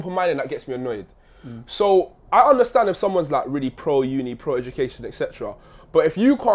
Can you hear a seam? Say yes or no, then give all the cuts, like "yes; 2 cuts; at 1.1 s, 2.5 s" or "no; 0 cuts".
no; 0 cuts